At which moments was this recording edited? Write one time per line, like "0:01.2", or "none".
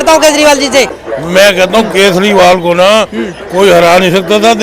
0:01.5